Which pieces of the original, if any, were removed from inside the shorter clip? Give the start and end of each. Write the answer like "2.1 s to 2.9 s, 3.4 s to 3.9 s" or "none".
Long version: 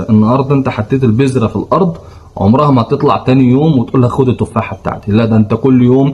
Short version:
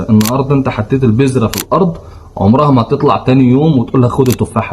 none